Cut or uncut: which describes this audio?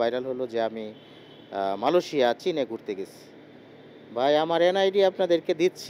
uncut